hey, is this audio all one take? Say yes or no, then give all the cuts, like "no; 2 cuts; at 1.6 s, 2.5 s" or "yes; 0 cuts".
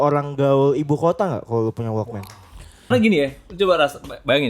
no; 1 cut; at 2.9 s